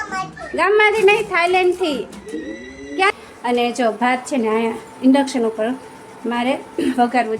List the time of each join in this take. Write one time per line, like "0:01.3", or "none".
0:03.1